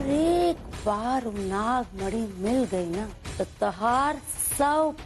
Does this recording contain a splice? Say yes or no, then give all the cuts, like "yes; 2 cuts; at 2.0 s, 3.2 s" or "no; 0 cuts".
yes; 1 cut; at 3.2 s